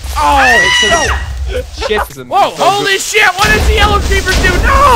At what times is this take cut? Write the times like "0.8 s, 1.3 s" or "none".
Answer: 2.1 s